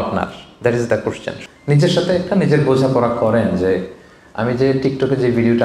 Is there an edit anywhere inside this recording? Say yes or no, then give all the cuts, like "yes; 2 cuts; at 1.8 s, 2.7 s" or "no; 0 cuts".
yes; 1 cut; at 1.3 s